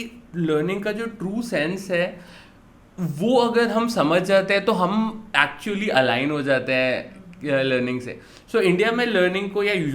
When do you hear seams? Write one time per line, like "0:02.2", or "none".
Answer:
none